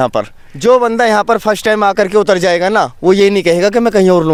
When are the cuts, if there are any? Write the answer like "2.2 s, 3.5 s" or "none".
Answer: none